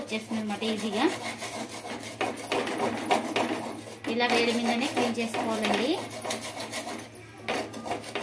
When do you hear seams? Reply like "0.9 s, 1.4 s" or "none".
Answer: none